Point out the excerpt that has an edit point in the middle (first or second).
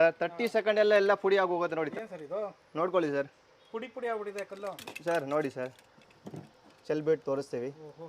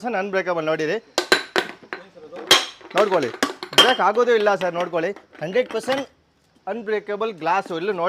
first